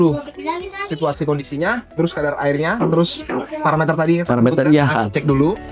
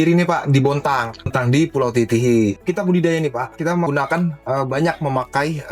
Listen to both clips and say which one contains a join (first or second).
second